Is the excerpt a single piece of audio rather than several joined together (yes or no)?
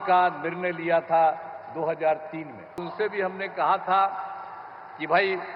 no